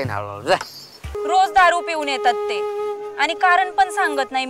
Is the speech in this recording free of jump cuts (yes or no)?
no